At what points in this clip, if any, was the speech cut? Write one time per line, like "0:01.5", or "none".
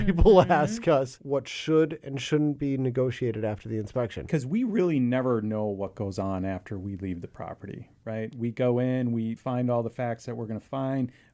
0:01.2
0:04.3